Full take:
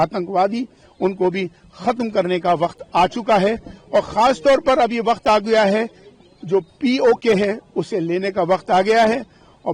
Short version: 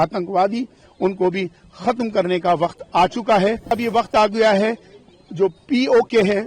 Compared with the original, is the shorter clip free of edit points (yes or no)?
no